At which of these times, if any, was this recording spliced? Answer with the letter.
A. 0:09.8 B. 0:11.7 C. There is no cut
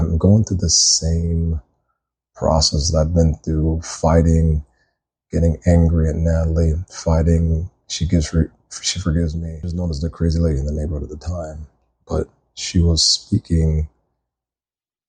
A